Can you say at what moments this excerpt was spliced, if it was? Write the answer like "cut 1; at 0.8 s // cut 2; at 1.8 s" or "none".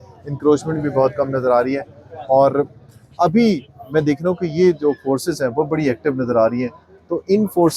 none